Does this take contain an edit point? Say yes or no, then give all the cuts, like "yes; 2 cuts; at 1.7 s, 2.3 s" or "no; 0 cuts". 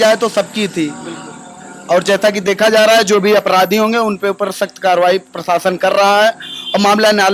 no; 0 cuts